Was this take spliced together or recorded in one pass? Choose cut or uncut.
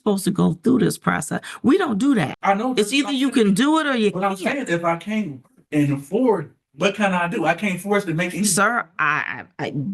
cut